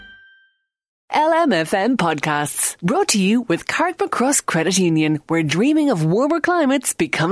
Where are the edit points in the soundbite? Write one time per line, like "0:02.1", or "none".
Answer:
0:00.9